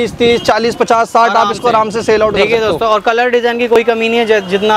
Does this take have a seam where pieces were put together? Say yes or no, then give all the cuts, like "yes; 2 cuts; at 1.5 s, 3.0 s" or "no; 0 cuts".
no; 0 cuts